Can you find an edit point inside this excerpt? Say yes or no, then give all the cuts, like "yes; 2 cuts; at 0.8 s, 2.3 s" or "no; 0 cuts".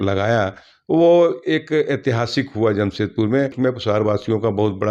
yes; 1 cut; at 3.5 s